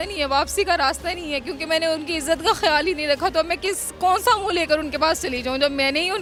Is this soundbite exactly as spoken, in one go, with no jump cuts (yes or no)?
yes